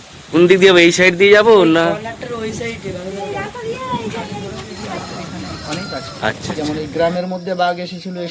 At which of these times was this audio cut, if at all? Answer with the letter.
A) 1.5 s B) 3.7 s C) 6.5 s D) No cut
C